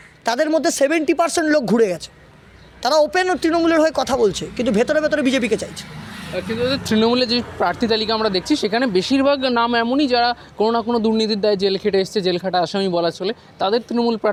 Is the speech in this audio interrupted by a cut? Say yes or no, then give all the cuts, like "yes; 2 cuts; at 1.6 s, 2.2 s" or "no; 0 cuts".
no; 0 cuts